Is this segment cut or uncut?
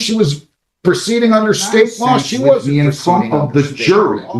cut